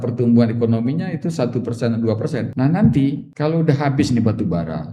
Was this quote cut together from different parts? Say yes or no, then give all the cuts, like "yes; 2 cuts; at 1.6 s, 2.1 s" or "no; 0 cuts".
yes; 2 cuts; at 2.5 s, 3.3 s